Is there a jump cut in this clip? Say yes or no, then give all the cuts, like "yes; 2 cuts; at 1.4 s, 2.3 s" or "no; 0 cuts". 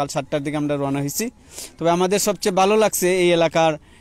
no; 0 cuts